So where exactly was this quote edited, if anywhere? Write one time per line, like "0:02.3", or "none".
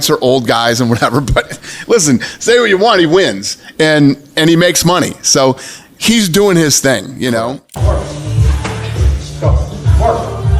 0:07.8

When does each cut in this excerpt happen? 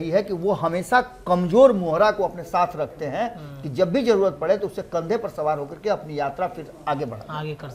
none

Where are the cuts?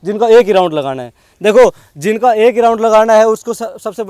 none

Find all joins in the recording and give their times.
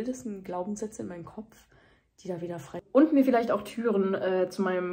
0:02.8

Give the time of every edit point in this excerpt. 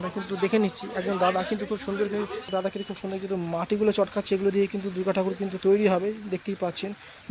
0:02.2

